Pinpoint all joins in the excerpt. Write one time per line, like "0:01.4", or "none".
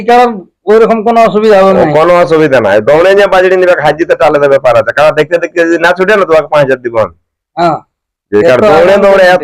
none